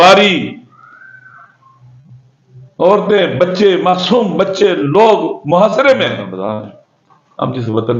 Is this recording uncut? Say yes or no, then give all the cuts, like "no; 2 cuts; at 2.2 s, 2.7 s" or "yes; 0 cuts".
no; 1 cut; at 6.3 s